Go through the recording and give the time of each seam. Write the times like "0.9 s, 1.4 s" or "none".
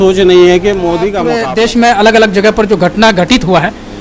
1.2 s